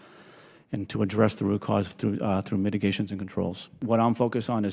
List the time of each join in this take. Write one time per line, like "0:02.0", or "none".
0:03.8

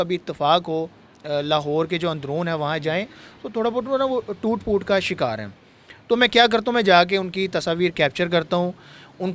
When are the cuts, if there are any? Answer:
none

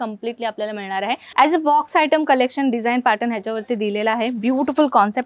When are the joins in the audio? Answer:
0:01.3

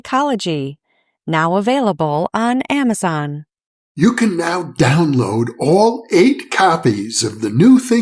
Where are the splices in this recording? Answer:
none

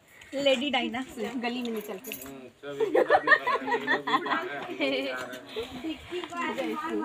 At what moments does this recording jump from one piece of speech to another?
0:01.1

